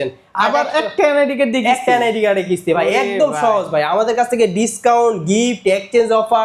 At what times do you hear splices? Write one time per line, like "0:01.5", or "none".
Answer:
none